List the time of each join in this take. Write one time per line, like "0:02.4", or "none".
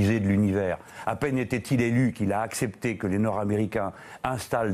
0:02.8